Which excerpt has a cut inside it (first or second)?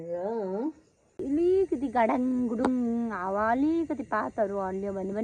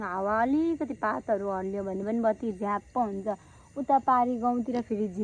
first